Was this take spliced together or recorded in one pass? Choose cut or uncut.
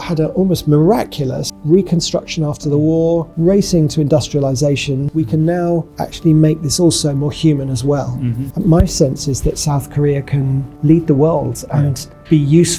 uncut